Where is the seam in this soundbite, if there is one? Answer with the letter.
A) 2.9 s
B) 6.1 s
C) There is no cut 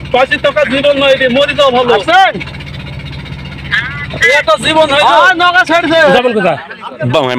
B